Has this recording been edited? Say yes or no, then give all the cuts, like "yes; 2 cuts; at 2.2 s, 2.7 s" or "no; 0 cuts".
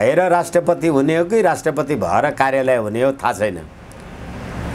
no; 0 cuts